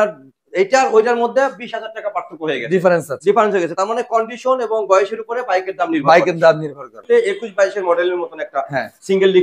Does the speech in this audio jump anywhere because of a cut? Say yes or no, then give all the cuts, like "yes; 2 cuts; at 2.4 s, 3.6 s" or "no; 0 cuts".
yes; 1 cut; at 6.9 s